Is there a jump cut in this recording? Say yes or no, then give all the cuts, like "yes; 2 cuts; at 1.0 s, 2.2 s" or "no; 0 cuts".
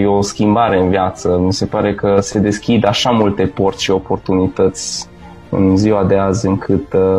no; 0 cuts